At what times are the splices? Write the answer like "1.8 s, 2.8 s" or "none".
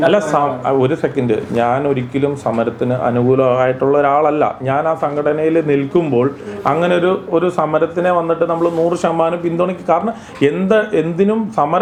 none